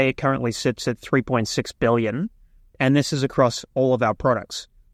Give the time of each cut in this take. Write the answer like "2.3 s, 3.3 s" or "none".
none